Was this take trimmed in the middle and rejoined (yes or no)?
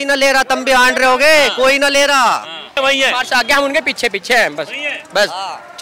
yes